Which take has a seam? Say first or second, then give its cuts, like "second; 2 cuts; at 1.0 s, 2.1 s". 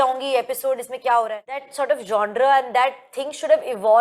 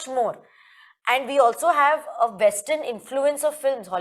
first; 1 cut; at 1.7 s